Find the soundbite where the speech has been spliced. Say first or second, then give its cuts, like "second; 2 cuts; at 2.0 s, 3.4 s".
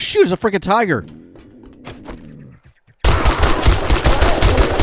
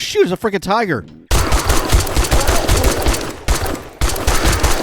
second; 1 cut; at 1.1 s